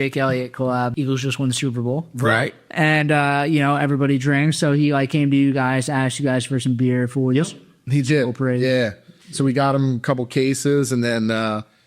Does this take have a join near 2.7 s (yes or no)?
no